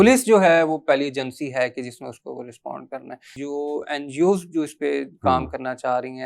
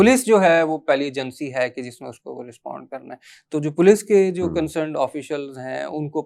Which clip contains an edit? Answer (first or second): first